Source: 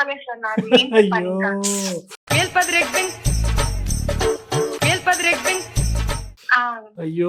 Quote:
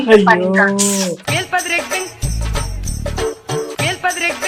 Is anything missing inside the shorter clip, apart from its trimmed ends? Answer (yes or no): yes